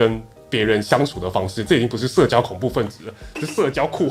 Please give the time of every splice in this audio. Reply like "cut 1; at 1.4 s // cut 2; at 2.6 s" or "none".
none